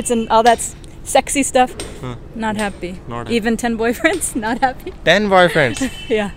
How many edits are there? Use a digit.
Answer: 0